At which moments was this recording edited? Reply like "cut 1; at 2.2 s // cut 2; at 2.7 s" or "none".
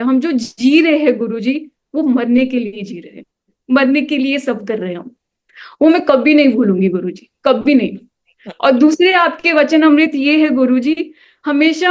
none